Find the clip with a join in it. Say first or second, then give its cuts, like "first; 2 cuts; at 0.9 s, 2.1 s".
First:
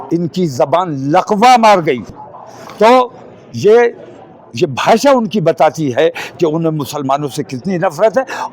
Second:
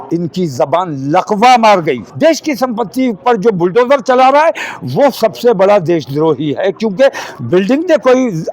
second; 1 cut; at 2.1 s